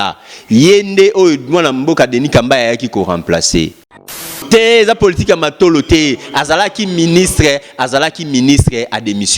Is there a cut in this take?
yes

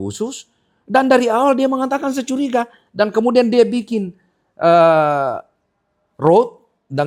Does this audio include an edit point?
no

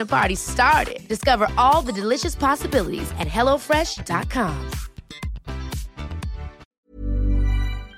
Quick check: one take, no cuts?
no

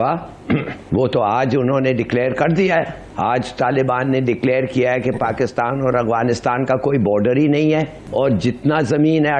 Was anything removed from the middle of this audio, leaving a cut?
yes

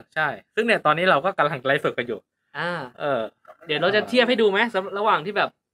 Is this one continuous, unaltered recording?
yes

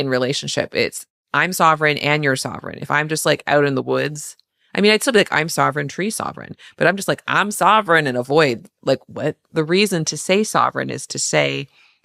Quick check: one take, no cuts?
no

